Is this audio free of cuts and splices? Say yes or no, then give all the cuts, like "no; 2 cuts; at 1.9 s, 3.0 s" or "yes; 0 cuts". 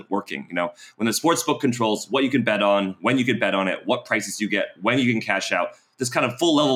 yes; 0 cuts